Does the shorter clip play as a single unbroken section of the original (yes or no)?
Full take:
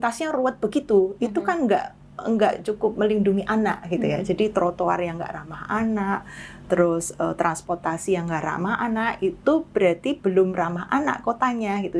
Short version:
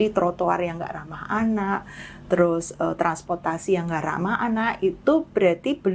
yes